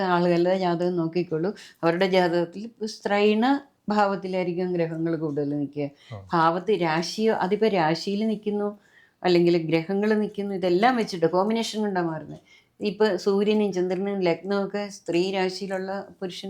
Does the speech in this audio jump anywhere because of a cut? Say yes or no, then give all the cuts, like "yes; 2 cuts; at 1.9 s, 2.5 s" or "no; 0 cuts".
no; 0 cuts